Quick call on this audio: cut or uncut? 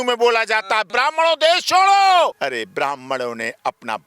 cut